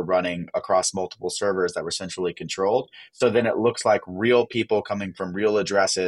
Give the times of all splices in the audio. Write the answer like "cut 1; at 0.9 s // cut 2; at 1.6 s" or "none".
none